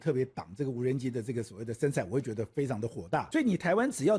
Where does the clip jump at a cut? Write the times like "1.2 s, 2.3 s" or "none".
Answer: 3.3 s